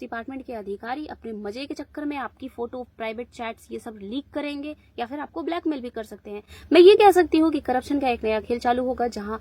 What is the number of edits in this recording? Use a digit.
0